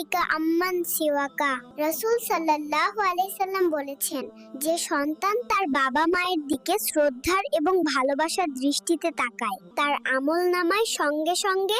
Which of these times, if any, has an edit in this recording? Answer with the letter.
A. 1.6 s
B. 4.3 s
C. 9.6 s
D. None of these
A